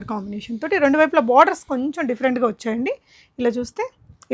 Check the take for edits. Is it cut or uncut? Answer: uncut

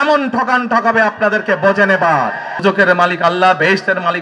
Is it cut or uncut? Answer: cut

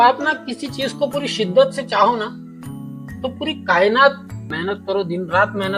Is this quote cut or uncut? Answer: cut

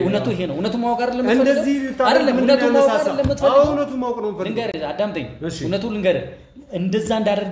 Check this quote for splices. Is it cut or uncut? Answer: uncut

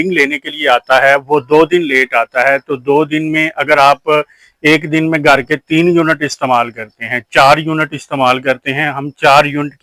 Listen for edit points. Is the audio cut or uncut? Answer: uncut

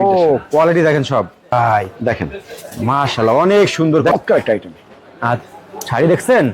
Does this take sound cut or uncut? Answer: cut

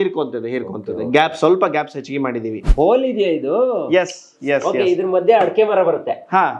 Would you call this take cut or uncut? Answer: cut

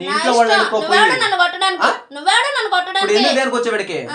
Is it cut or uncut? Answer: uncut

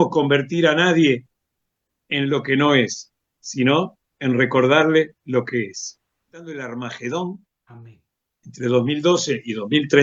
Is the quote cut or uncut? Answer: cut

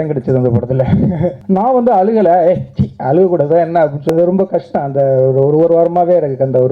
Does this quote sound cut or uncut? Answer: cut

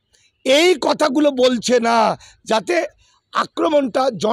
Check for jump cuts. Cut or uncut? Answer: uncut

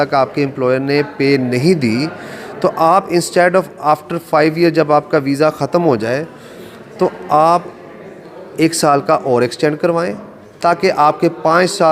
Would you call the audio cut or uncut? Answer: uncut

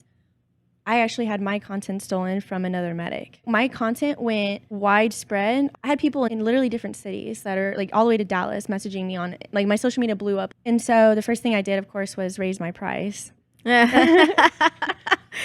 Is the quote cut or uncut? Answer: cut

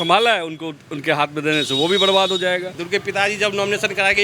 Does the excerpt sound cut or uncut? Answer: cut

